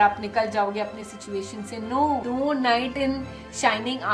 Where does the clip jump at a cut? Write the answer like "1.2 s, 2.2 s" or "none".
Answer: 2.2 s

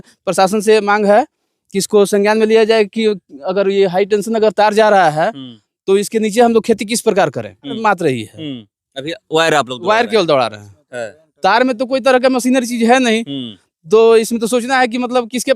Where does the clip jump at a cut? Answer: 7.8 s

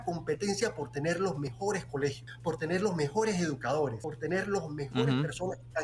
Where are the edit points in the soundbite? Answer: 1.9 s, 4.0 s

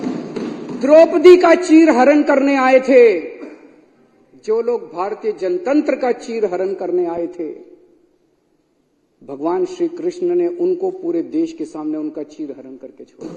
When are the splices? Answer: none

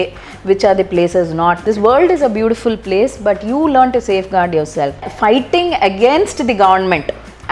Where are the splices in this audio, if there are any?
1.6 s, 5.1 s

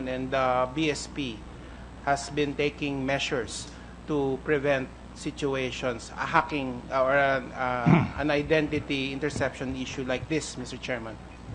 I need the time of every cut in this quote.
4.6 s

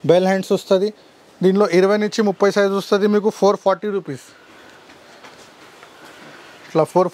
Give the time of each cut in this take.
none

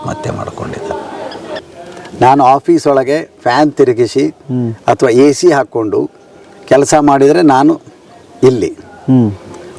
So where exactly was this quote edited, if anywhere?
1.6 s

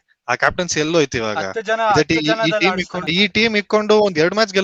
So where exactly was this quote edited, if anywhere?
3.1 s

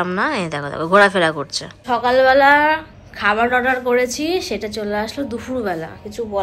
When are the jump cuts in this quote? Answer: 1.8 s

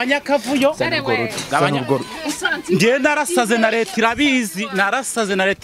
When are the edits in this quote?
none

